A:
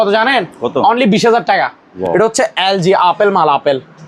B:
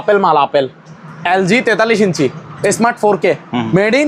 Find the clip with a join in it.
A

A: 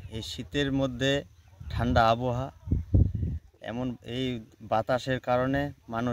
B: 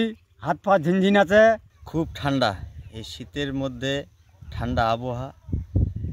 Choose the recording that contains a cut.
B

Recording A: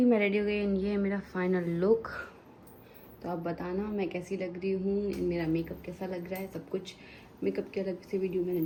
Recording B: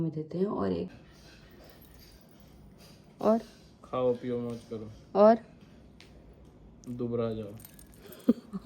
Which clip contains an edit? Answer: B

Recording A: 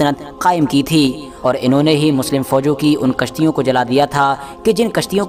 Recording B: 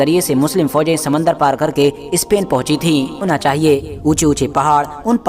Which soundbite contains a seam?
B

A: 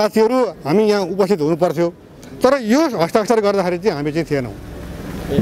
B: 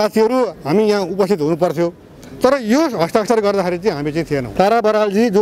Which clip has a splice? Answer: B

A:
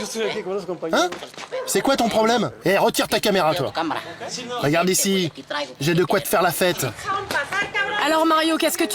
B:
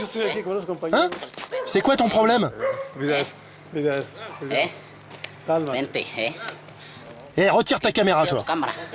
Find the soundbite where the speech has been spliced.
A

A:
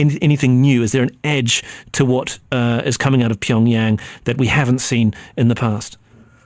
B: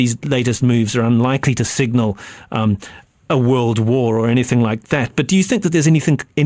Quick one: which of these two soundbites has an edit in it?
B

